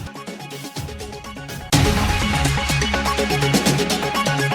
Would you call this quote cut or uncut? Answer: uncut